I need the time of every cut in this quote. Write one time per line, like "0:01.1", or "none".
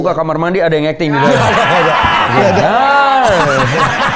none